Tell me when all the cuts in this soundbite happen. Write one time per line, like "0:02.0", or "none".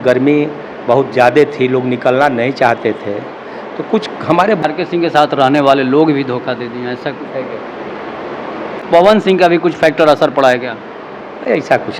0:04.6
0:08.8